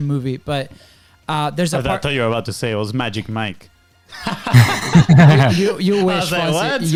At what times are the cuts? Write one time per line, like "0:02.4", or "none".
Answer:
none